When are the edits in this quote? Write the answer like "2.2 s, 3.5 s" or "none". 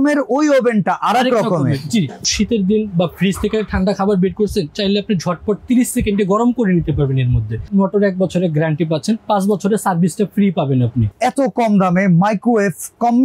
2.3 s, 7.6 s, 11.1 s